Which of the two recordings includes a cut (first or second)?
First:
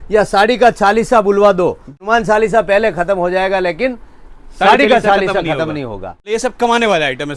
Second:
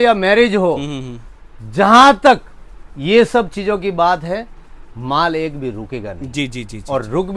first